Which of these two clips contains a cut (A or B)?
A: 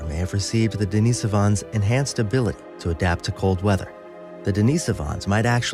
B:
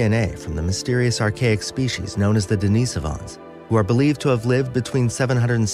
B